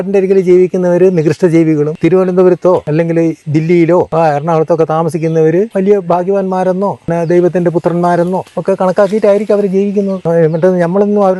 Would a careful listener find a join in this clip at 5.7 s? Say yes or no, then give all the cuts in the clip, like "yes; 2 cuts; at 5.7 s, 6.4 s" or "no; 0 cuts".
yes; 7 cuts; at 1.9 s, 2.9 s, 4.1 s, 5.7 s, 7.1 s, 8.5 s, 10.2 s